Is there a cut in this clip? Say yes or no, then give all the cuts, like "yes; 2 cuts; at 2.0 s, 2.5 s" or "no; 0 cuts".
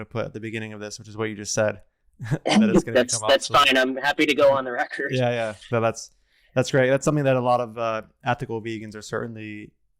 no; 0 cuts